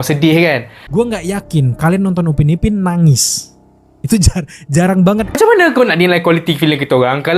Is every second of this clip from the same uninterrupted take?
no; 1 cut; at 5.3 s

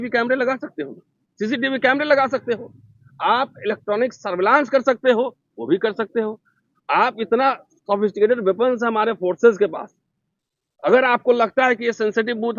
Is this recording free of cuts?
yes; 0 cuts

